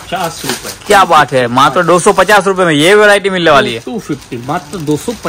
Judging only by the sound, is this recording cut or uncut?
uncut